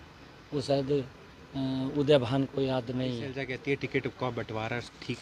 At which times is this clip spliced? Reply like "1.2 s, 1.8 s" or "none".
3.3 s